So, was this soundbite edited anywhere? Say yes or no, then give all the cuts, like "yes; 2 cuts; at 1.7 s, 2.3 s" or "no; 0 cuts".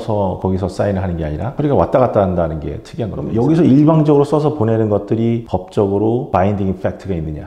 yes; 1 cut; at 3.2 s